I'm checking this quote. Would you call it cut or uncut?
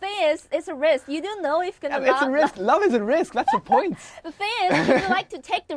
uncut